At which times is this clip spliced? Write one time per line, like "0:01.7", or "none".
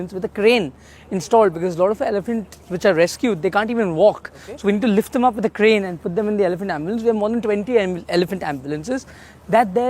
none